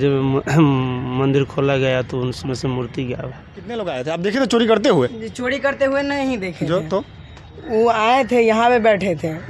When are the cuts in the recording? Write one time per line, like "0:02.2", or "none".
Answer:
0:03.8